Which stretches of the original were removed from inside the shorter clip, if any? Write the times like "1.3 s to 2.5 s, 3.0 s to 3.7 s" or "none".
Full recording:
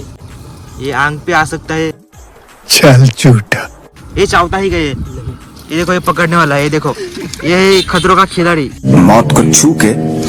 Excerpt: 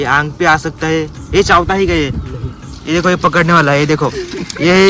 2.0 s to 4.0 s

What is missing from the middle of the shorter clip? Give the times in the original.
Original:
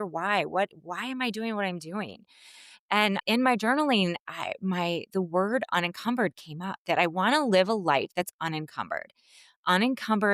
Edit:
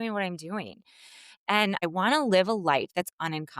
3.3 s to 7.0 s

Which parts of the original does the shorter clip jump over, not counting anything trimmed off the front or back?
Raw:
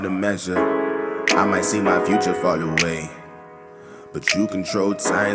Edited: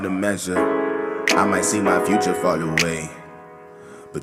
none

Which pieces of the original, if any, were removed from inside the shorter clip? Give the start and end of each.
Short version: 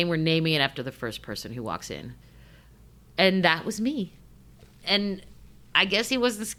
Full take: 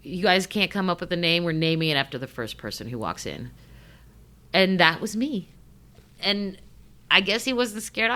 none

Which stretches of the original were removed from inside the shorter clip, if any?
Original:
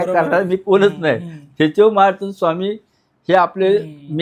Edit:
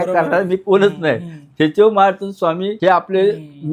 2.7 s to 3.2 s

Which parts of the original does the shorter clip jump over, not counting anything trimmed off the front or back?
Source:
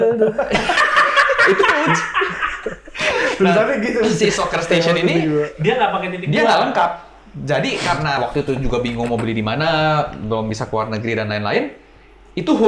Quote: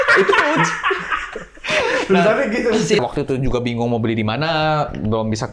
4.3 s to 8.2 s

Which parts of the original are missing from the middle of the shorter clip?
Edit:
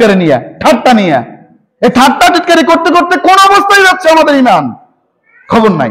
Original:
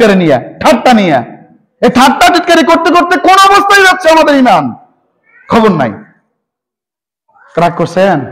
none

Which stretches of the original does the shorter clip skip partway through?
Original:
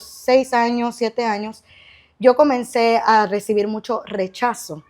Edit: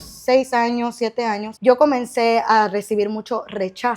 1.5 s to 2.1 s

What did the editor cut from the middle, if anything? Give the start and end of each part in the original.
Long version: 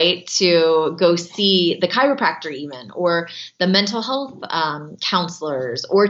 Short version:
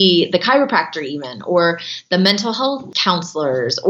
4.4 s to 5.0 s

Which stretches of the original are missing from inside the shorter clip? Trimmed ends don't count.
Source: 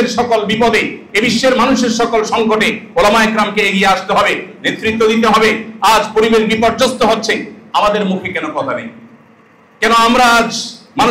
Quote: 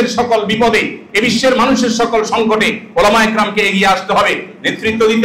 none

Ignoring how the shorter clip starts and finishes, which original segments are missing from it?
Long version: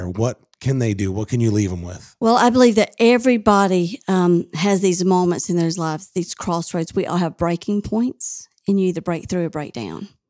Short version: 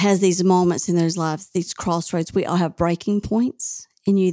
none

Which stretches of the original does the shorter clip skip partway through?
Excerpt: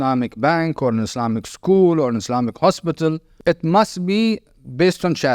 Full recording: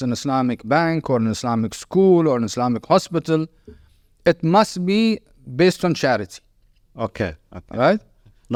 3.6 s to 4.1 s

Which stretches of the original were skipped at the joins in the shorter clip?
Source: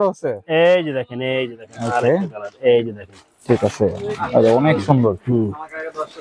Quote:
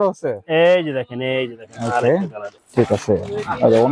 2.4 s to 3.1 s

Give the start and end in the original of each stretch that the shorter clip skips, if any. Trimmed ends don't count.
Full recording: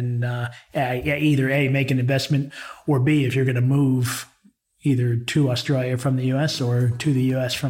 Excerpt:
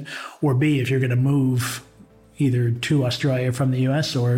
none

